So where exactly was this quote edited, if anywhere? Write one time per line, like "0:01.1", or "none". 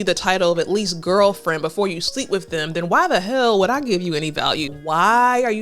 0:04.7

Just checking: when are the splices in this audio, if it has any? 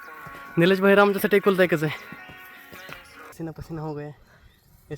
0:03.3

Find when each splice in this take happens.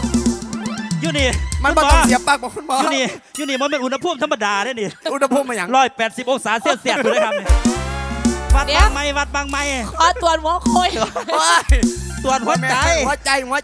none

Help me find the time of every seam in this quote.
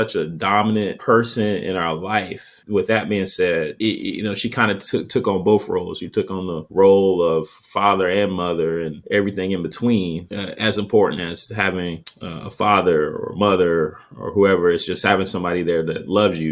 0:10.3

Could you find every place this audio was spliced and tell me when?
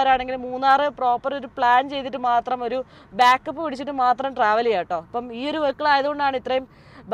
none

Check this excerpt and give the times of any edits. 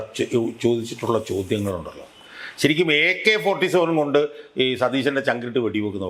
none

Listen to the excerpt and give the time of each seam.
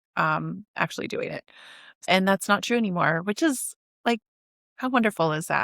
0:02.0

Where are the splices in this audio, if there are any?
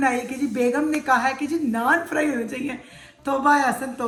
none

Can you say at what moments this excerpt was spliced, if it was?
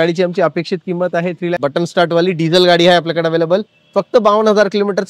0:01.6

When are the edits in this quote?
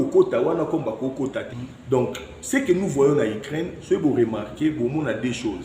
0:01.5

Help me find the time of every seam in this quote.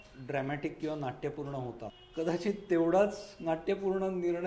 0:02.0

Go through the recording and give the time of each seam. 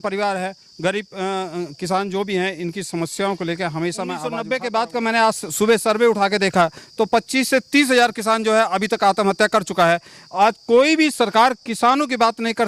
0:04.4

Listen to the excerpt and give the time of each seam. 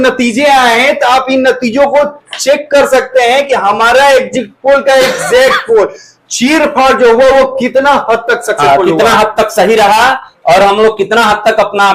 none

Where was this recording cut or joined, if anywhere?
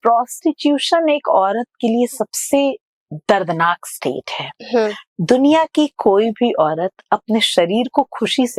none

